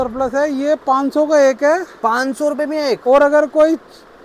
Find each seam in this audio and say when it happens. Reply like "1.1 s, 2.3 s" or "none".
none